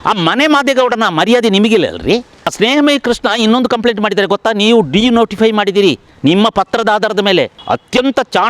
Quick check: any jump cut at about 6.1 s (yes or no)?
no